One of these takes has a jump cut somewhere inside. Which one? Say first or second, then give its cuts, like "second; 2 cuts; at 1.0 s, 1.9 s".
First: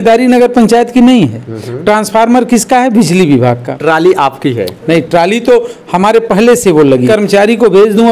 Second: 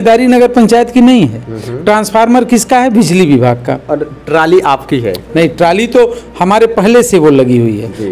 first; 2 cuts; at 3.7 s, 7.1 s